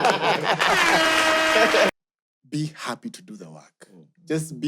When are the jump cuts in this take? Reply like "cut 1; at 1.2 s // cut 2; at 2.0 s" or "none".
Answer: cut 1; at 1.9 s

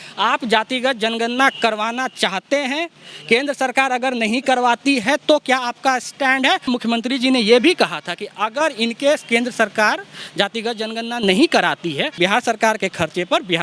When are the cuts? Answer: cut 1; at 6.7 s // cut 2; at 12.2 s

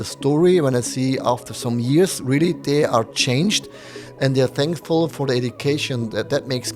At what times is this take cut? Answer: none

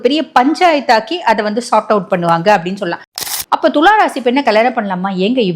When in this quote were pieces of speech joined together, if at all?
cut 1; at 3.2 s

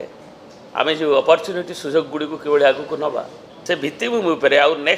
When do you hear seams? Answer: cut 1; at 4.0 s

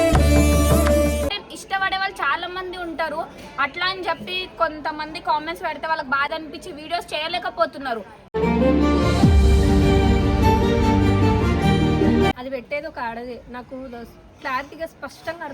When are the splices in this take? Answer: cut 1; at 1.3 s // cut 2; at 12.3 s

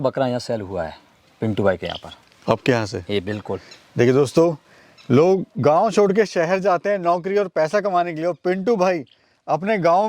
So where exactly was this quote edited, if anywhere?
none

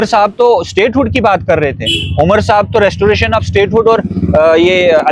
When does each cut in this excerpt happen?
none

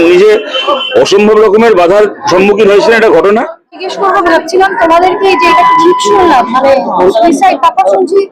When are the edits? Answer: cut 1; at 3.9 s

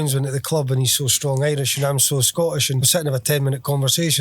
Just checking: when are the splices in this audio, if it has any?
cut 1; at 2.8 s

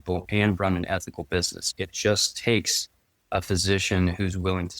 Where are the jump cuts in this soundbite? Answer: cut 1; at 1.6 s

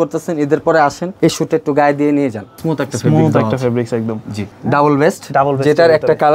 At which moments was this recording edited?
cut 1; at 1.1 s // cut 2; at 2.6 s // cut 3; at 4.5 s

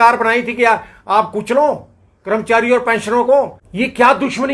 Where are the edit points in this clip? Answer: cut 1; at 3.6 s

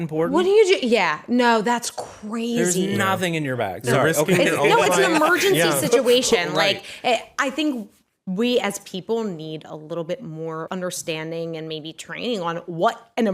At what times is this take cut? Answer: cut 1; at 10.7 s

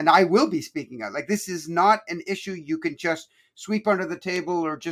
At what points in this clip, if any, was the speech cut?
none

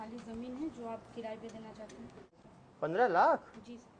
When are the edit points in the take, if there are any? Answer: cut 1; at 2.3 s

